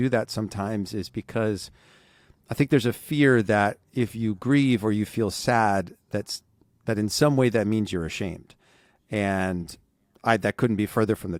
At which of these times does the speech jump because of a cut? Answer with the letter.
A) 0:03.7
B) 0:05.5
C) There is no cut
C